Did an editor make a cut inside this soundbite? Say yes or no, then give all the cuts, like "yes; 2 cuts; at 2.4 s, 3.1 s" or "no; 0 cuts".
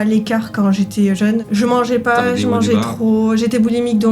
yes; 1 cut; at 1.4 s